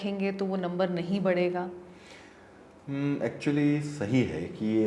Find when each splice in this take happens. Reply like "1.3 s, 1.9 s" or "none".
none